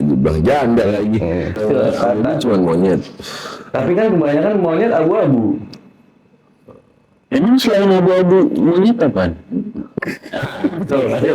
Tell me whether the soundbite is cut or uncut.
cut